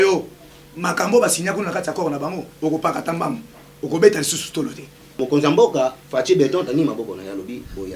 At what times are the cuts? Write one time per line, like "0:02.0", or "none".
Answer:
0:05.2